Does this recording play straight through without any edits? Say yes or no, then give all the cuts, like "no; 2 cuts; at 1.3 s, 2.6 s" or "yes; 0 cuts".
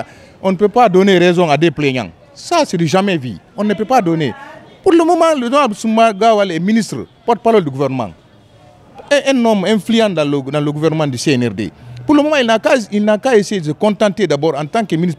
yes; 0 cuts